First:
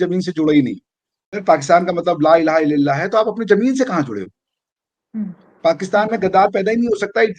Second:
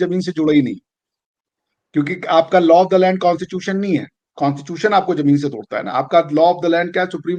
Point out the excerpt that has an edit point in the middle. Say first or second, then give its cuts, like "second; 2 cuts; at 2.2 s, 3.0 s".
first; 1 cut; at 1.4 s